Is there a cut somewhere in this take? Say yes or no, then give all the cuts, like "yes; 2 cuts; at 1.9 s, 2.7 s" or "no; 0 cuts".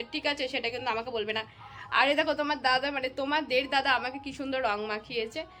no; 0 cuts